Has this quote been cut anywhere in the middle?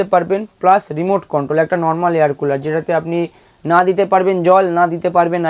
no; 0 cuts

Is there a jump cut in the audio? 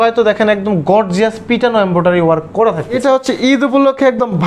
yes; 1 cut; at 3.0 s

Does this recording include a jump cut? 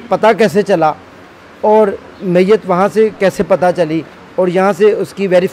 no; 0 cuts

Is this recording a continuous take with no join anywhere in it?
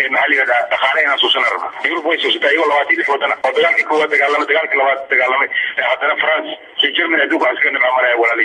no; 2 cuts; at 1.8 s, 3.4 s

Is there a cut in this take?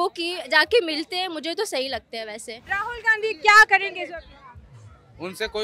yes; 1 cut; at 2.8 s

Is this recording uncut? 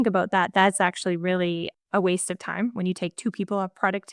no; 1 cut; at 1.8 s

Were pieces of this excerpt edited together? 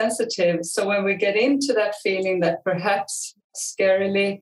yes; 1 cut; at 3.5 s

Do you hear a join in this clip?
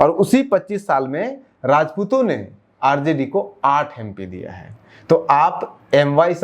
no; 0 cuts

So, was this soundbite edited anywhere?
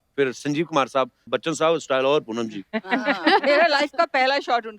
yes; 1 cut; at 1.2 s

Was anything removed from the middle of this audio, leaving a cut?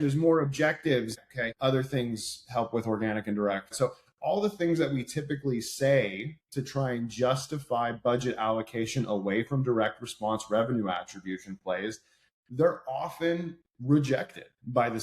yes; 2 cuts; at 1.3 s, 3.7 s

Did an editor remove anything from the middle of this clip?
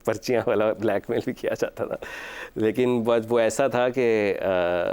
no; 0 cuts

